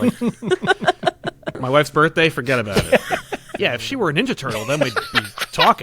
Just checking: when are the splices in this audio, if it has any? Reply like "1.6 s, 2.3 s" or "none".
1.5 s, 3.6 s

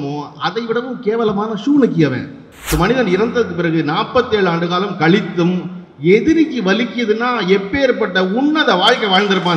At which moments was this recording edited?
2.7 s

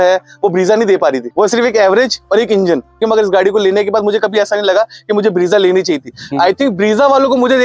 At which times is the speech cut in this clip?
1.2 s, 3.0 s

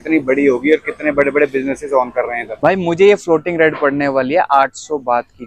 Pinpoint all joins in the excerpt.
2.5 s

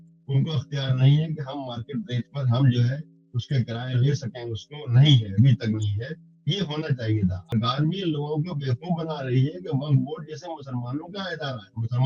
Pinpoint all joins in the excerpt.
7.4 s

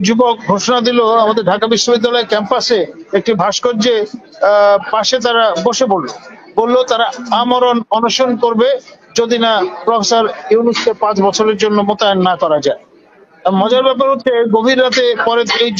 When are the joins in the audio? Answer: none

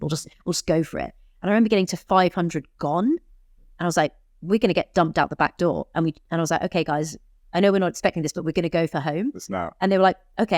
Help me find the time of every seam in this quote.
none

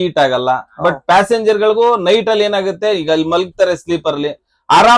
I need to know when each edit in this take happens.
none

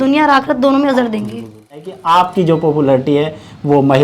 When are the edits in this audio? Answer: 1.6 s

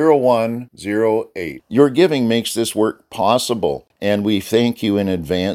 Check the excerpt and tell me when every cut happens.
3.9 s

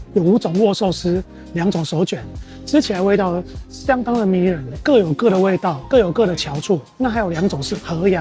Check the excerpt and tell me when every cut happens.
none

